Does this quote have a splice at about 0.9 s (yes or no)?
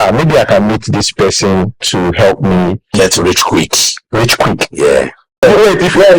no